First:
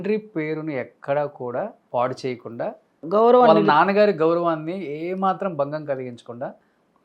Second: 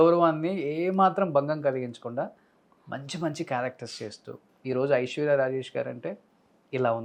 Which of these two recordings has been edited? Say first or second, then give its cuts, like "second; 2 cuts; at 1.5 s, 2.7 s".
first; 2 cuts; at 1.8 s, 3.0 s